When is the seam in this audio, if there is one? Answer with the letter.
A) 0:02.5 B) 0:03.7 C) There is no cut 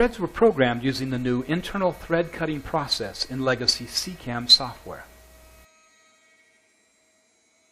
B